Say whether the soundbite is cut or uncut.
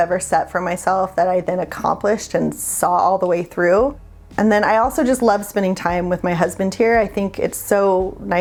uncut